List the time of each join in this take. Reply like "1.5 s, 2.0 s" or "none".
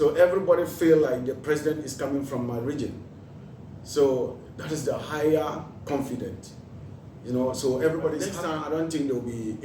8.4 s